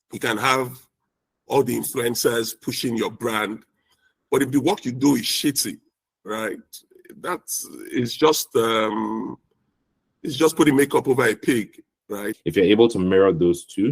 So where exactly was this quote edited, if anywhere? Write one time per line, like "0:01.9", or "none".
0:12.3